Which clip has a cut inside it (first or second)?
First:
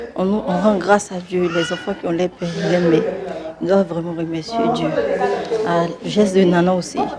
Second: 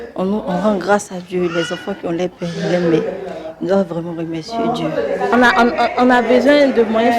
second